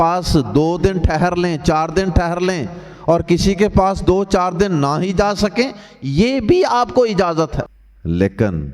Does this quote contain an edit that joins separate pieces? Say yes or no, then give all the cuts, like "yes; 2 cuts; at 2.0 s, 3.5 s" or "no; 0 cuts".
no; 0 cuts